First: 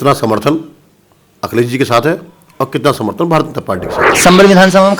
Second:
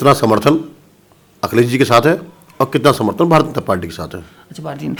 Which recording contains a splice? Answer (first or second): first